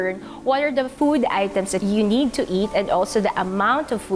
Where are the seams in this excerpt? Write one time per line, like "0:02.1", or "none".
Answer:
0:00.9
0:01.8